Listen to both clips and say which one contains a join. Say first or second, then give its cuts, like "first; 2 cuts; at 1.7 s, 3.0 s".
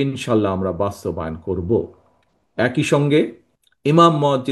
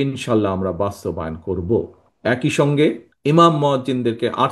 second; 2 cuts; at 2.0 s, 3.1 s